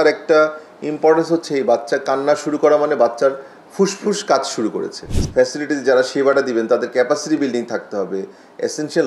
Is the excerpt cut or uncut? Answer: cut